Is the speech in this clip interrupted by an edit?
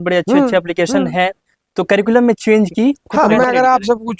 yes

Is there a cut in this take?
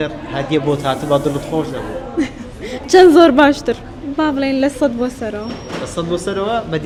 no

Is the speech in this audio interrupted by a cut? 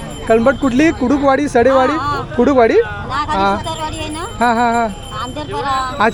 no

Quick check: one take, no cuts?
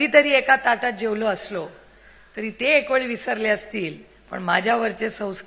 yes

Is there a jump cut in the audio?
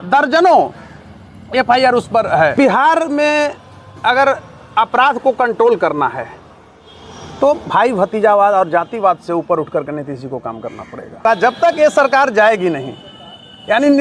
yes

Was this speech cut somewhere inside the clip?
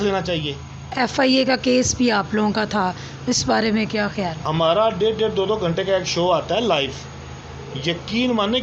yes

